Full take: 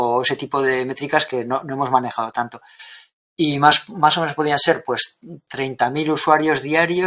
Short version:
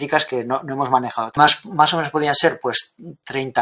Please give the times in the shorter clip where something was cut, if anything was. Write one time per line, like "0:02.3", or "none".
0:01.3